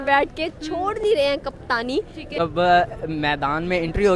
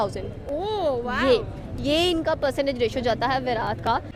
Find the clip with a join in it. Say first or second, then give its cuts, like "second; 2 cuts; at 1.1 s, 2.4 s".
first; 1 cut; at 2.4 s